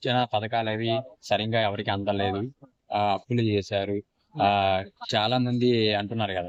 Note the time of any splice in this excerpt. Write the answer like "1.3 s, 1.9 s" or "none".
none